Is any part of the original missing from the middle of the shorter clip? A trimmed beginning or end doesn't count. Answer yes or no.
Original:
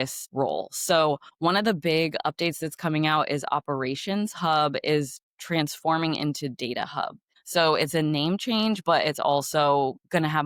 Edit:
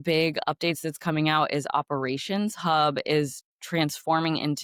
no